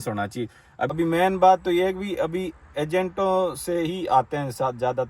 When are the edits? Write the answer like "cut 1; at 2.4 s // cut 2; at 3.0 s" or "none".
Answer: cut 1; at 0.9 s